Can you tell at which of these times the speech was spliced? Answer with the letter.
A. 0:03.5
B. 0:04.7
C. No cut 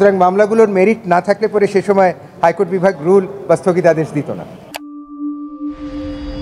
B